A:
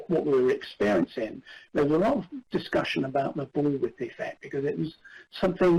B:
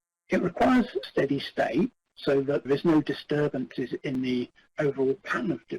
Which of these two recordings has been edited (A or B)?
B